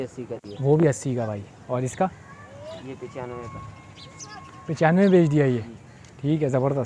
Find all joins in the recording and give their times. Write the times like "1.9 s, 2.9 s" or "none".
none